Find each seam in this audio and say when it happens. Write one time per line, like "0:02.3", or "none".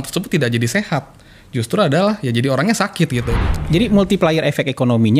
0:03.3